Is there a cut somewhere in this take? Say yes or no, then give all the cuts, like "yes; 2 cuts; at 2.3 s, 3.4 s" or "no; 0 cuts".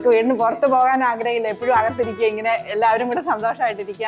no; 0 cuts